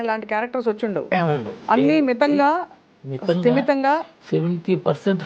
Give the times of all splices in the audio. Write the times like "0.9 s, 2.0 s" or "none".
4.2 s